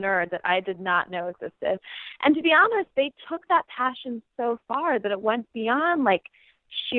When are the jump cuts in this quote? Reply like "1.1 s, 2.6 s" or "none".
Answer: none